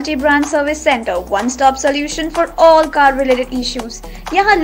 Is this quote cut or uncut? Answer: uncut